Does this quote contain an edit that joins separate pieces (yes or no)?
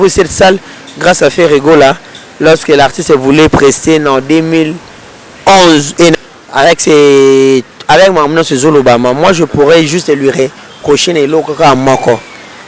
yes